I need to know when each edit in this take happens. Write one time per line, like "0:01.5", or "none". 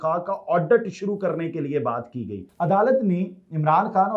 0:02.5